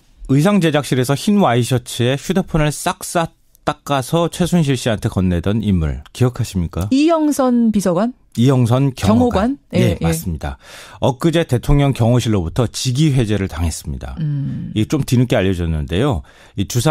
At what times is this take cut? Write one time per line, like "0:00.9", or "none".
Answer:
0:05.4